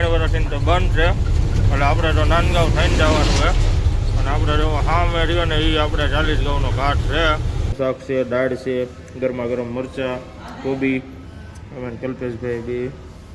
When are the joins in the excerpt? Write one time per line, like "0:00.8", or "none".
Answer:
0:07.8